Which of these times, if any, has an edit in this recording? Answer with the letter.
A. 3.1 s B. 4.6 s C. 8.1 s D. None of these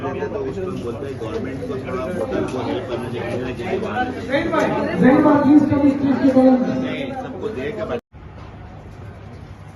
C